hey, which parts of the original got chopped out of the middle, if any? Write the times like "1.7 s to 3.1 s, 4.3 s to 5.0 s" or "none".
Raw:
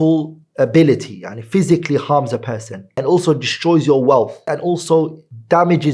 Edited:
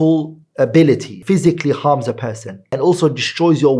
1.1 s to 1.4 s